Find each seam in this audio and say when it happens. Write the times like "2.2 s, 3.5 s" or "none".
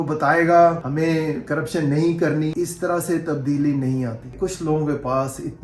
0.8 s, 2.5 s, 4.3 s